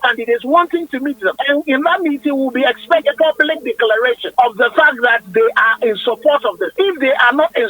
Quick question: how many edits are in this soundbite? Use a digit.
4